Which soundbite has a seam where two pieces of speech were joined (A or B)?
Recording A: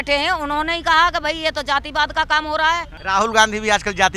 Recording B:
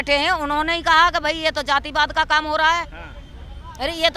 A